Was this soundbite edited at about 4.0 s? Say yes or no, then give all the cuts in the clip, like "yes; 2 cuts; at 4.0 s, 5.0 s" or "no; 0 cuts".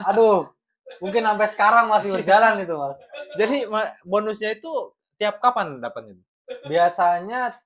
no; 0 cuts